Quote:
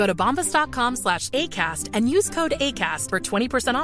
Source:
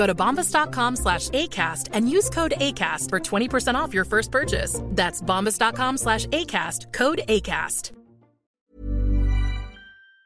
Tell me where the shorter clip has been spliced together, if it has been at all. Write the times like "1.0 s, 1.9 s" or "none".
none